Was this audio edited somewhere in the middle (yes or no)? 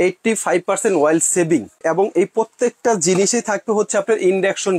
yes